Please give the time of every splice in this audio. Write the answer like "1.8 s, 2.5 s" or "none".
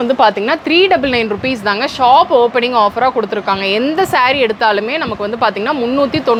none